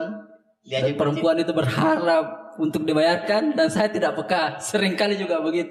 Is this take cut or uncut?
uncut